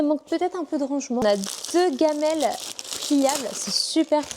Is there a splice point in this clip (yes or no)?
yes